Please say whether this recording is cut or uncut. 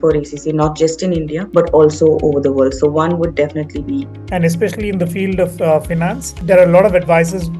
cut